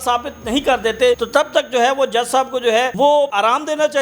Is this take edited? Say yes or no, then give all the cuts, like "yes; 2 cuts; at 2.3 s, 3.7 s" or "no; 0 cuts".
yes; 2 cuts; at 1.2 s, 3.1 s